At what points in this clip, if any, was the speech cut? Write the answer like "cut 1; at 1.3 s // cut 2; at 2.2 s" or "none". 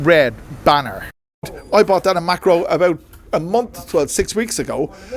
cut 1; at 1.6 s